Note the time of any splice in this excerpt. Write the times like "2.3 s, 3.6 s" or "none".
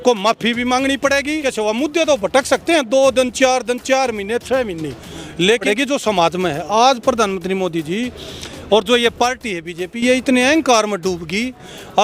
1.4 s, 5.6 s